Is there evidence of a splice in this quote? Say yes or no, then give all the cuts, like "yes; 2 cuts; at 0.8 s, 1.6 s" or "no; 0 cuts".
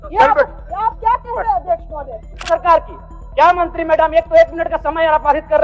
yes; 1 cut; at 2.5 s